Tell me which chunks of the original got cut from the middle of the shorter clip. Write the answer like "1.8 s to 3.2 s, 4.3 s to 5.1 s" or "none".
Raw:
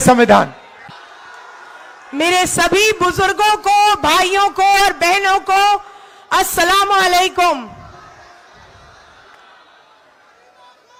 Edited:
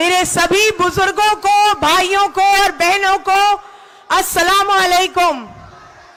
none